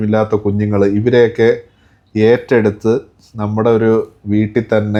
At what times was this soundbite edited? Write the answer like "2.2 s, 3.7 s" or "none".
none